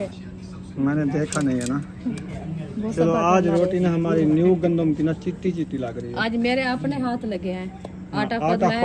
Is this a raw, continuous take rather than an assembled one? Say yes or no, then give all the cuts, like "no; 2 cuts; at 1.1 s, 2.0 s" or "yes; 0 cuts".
yes; 0 cuts